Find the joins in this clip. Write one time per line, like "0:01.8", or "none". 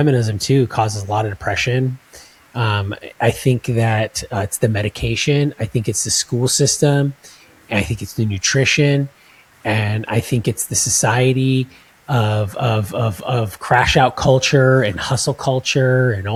none